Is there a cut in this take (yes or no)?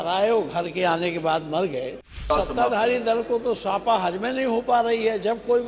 yes